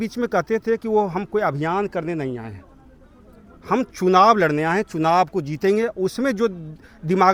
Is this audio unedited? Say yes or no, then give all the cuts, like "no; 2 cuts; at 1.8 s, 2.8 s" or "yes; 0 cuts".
yes; 0 cuts